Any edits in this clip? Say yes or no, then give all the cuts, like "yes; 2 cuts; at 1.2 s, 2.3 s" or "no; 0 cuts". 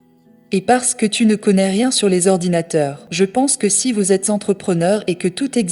yes; 1 cut; at 3.0 s